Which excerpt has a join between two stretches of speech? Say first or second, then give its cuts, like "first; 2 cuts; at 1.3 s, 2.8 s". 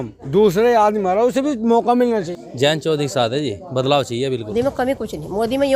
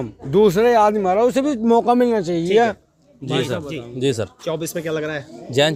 first; 2 cuts; at 2.3 s, 4.8 s